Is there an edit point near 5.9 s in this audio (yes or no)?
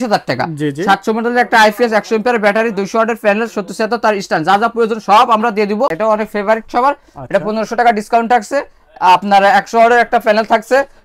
yes